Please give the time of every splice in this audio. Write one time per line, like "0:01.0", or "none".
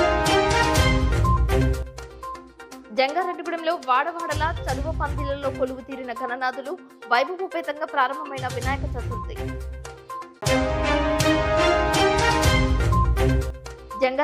0:02.4